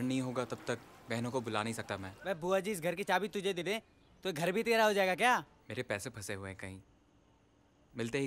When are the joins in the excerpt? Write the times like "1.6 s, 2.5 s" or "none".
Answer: 2.1 s, 5.6 s